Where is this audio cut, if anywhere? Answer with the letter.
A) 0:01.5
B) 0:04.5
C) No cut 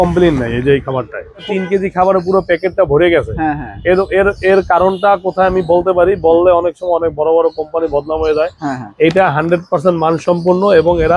A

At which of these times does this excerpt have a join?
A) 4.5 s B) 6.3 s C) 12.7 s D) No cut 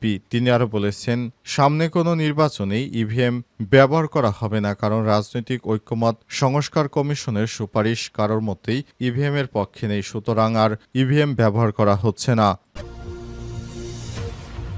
C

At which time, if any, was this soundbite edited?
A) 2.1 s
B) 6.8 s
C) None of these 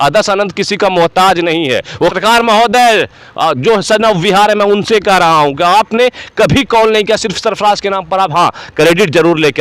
A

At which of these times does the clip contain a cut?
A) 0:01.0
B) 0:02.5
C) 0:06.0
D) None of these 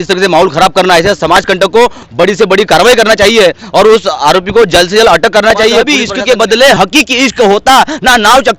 C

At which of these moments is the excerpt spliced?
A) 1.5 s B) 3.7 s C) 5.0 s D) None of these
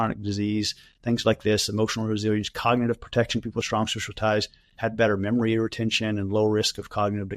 B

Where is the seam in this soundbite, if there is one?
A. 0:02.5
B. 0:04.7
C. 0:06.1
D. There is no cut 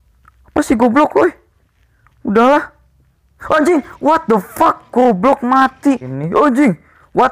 C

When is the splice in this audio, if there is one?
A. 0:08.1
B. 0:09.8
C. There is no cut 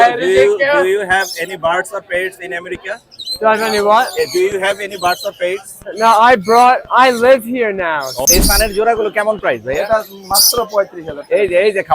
A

